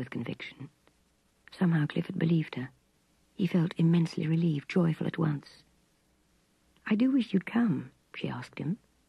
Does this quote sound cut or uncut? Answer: uncut